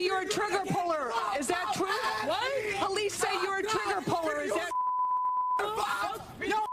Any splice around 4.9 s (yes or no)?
no